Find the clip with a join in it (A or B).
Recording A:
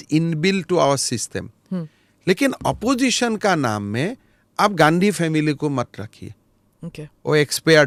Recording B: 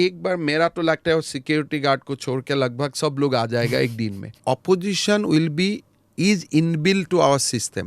B